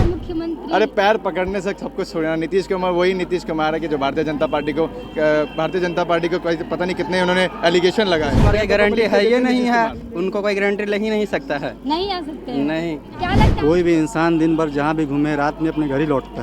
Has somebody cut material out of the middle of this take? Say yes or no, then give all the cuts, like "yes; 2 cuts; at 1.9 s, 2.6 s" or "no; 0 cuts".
yes; 2 cuts; at 8.4 s, 13.4 s